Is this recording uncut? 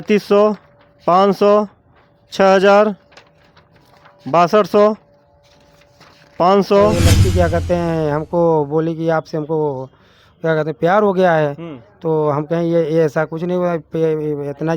no; 1 cut; at 7.0 s

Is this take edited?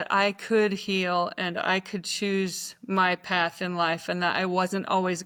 no; 0 cuts

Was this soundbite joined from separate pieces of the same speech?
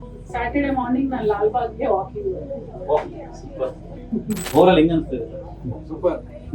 yes; 1 cut; at 4.4 s

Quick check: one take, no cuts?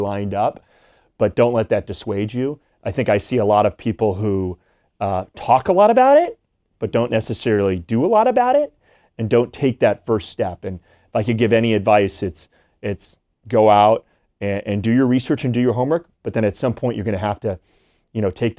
yes; 0 cuts

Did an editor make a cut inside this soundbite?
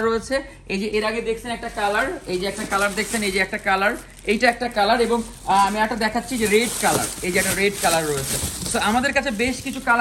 no; 0 cuts

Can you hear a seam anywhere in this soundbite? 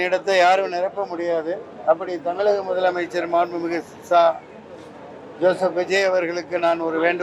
no; 0 cuts

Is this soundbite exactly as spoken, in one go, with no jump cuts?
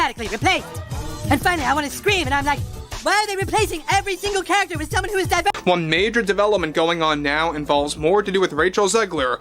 no; 1 cut; at 5.6 s

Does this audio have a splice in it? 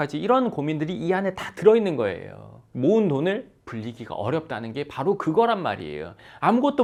no; 0 cuts

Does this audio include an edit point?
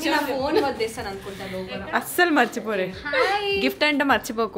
no; 0 cuts

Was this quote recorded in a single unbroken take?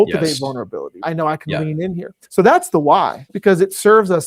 no; 3 cuts; at 1.0 s, 2.2 s, 3.3 s

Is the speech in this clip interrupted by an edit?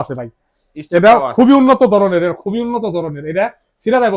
no; 0 cuts

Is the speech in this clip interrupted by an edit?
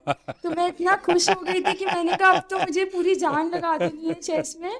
no; 0 cuts

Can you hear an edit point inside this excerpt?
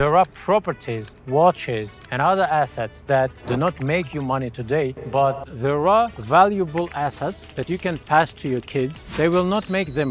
no; 0 cuts

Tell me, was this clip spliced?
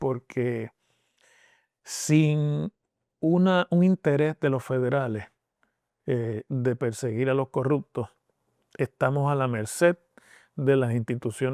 no; 0 cuts

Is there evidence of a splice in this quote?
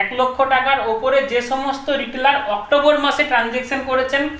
no; 0 cuts

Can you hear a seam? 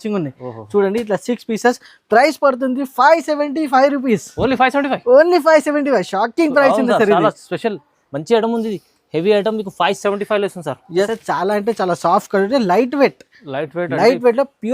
yes; 1 cut; at 11.1 s

